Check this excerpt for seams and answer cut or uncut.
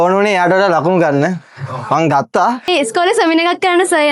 cut